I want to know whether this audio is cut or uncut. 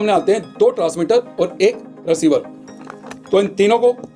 uncut